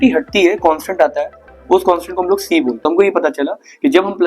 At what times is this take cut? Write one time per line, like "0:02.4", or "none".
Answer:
0:02.8